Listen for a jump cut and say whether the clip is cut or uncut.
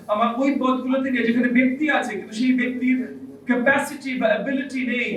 uncut